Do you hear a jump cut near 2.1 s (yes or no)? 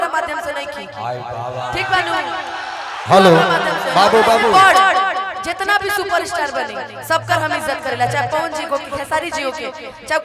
no